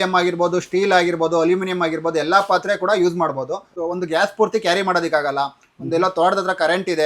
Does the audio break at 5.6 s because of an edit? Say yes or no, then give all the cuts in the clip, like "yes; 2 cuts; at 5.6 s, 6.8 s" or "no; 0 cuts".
no; 1 cut; at 3.6 s